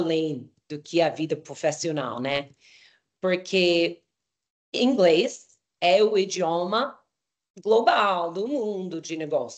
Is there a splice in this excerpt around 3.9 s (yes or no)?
no